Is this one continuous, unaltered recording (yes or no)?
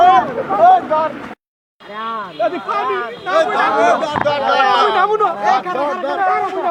yes